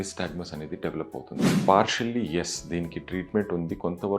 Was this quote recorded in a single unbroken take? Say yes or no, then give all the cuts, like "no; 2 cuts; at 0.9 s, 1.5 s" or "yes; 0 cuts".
no; 1 cut; at 1.5 s